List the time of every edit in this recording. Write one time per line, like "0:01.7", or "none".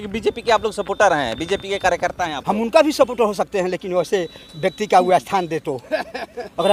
none